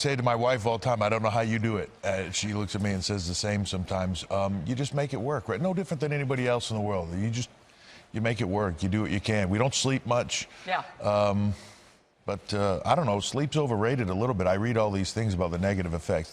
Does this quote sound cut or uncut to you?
cut